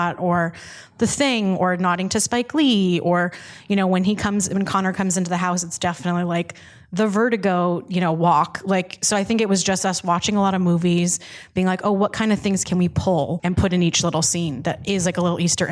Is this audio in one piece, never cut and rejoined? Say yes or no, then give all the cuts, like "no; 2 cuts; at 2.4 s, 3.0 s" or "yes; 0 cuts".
no; 1 cut; at 13.4 s